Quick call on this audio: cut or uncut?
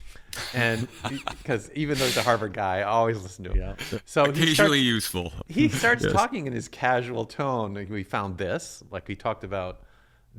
uncut